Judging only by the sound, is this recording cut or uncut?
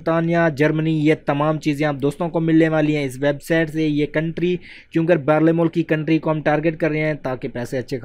uncut